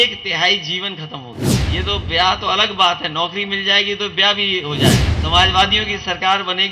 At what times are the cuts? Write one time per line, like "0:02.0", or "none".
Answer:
0:01.6
0:05.1